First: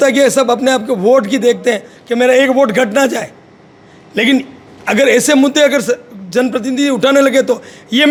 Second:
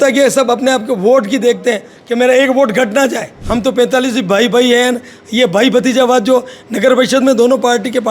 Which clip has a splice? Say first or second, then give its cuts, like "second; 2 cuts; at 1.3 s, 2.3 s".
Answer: second; 1 cut; at 3.4 s